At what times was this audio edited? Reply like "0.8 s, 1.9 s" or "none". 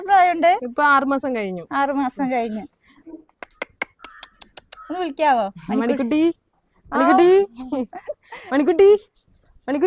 none